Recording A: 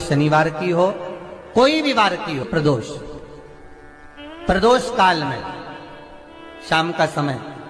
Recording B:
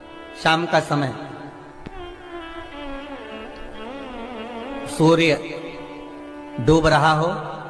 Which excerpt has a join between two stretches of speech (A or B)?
A